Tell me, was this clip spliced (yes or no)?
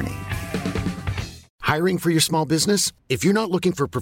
yes